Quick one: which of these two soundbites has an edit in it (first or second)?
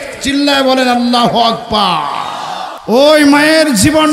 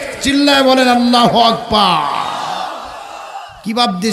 first